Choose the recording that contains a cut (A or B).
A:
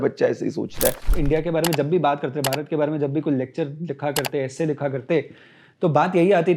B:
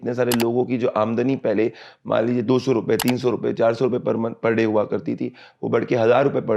A